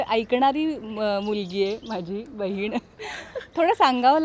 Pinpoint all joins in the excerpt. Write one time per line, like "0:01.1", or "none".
none